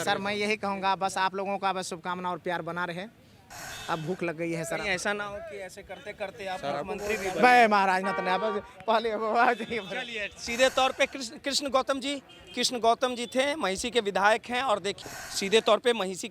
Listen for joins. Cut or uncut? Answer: cut